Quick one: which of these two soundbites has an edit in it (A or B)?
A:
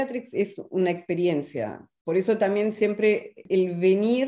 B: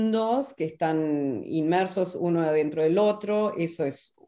A